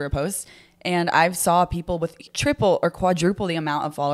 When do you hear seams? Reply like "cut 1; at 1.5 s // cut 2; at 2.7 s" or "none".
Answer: cut 1; at 2.2 s